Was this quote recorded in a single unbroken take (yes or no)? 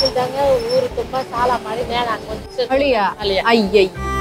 no